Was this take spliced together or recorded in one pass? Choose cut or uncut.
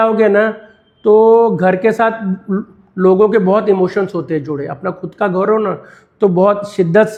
uncut